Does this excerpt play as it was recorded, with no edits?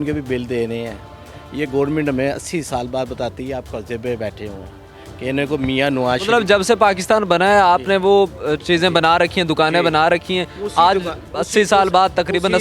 yes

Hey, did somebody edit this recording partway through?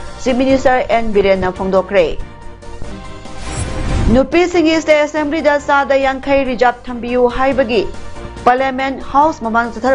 no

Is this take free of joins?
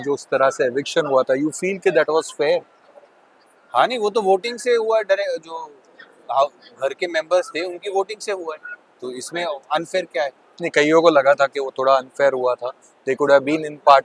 yes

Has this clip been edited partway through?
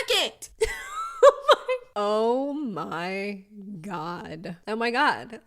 no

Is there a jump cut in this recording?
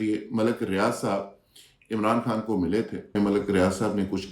yes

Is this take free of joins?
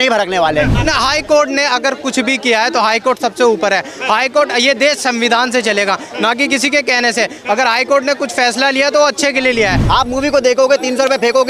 no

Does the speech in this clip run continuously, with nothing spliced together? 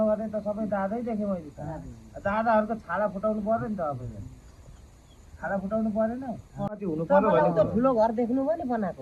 no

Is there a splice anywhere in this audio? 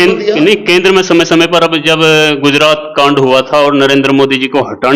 no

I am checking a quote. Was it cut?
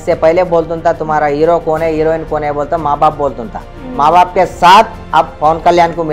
no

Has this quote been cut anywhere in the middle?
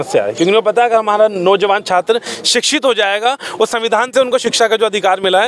no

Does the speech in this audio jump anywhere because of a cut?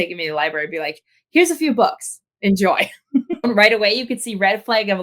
yes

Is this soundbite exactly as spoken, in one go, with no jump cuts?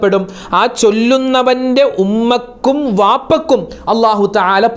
yes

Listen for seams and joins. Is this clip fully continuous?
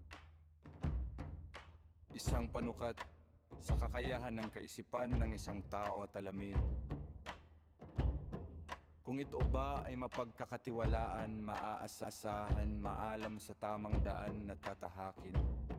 yes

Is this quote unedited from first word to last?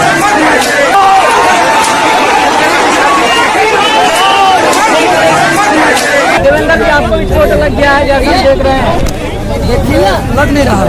yes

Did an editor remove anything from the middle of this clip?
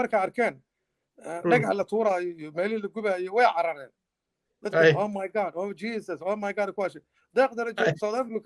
no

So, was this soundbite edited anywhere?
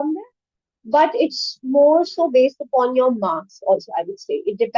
no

